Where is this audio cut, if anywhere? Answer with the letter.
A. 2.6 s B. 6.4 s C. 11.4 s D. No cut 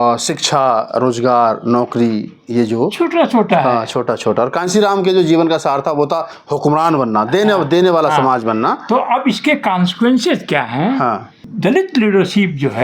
C